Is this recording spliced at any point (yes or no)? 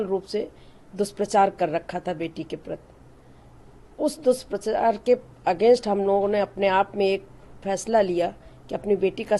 no